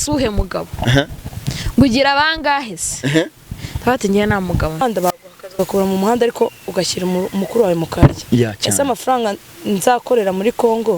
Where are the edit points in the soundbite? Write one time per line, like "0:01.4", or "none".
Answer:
0:04.8